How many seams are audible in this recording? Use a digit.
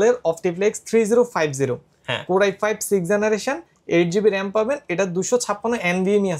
0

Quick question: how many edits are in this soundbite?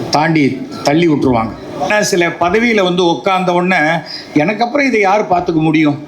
1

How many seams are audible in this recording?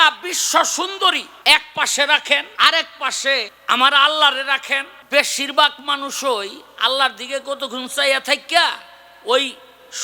4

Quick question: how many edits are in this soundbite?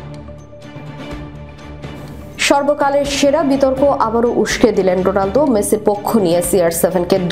0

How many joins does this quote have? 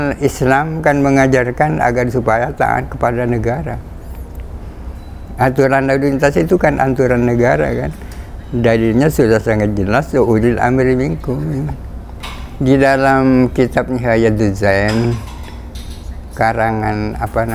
0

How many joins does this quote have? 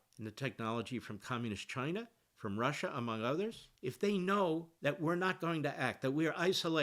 2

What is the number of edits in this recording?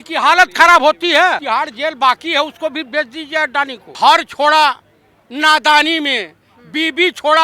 2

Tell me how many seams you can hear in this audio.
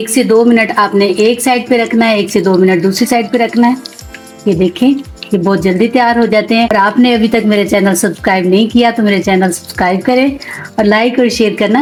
0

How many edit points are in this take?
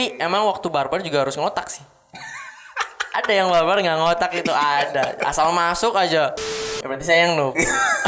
1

